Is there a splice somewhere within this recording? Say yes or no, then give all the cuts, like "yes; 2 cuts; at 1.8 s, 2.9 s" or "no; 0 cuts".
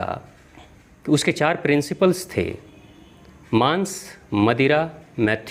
no; 0 cuts